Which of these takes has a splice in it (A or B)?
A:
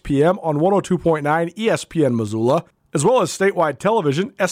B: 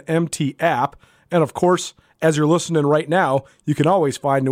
A